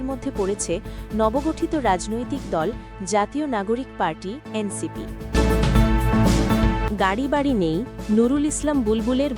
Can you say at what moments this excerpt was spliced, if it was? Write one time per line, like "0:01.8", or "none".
0:05.3
0:06.8